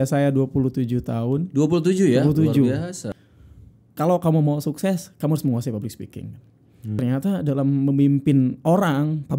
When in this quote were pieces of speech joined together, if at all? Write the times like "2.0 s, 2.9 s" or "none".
3.0 s, 7.0 s